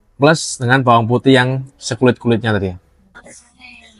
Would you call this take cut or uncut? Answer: uncut